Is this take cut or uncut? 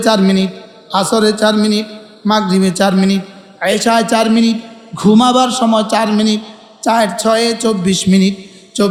uncut